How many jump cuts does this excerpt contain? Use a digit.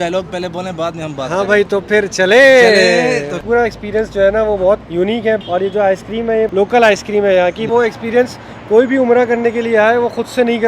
4